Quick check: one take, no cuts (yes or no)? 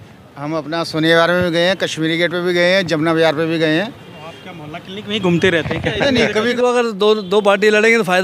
no